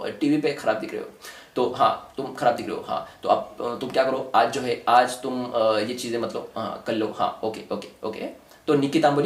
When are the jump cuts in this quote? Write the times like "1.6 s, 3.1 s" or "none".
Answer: none